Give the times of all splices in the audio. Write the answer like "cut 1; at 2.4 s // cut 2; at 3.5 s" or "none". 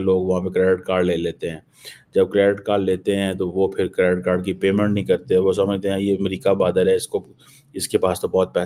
none